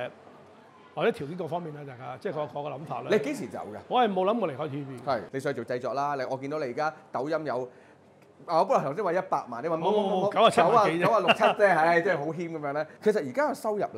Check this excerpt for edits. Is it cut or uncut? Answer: cut